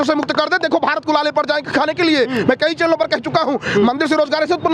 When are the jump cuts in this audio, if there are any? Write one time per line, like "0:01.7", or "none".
none